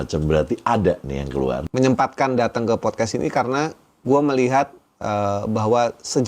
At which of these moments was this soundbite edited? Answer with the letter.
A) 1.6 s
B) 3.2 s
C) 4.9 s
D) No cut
A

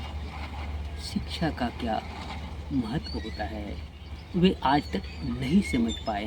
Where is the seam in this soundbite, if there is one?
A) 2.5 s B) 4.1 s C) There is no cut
C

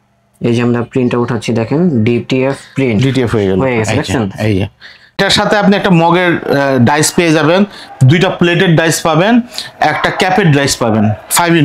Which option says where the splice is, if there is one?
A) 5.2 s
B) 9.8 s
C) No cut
A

